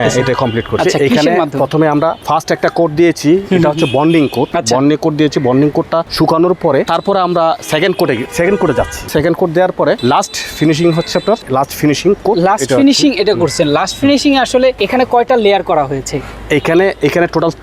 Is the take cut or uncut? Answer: cut